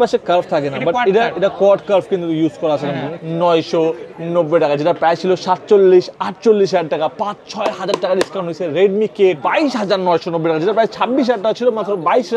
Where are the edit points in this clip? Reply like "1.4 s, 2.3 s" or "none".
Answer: 3.1 s, 9.4 s